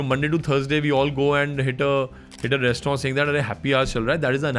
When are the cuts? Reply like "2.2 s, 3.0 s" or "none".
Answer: none